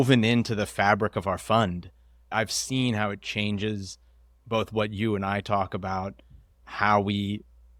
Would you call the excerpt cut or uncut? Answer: uncut